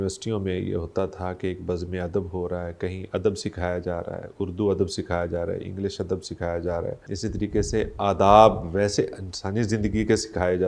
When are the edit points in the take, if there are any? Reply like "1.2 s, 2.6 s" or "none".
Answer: 7.1 s